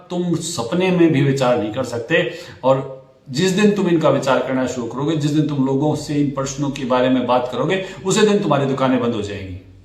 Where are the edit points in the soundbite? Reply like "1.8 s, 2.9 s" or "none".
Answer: none